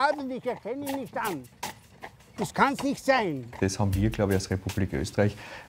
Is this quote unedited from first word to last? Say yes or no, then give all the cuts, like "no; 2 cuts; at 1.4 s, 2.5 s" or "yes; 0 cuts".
no; 1 cut; at 3.6 s